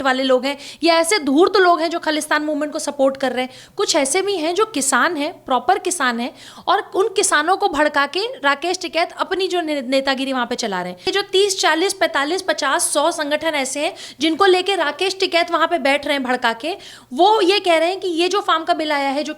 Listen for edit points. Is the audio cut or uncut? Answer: cut